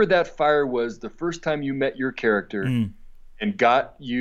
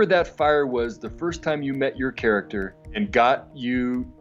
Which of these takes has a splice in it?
second; 1 cut; at 2.6 s

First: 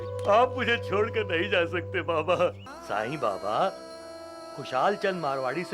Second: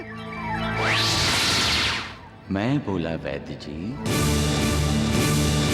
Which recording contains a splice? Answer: first; 1 cut; at 2.7 s

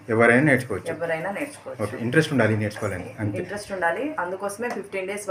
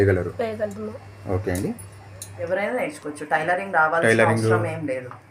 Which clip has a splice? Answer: second; 1 cut; at 2.3 s

